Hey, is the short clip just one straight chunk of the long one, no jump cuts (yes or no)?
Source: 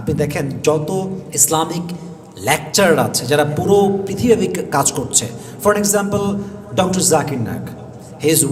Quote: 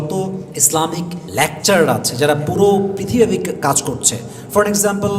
no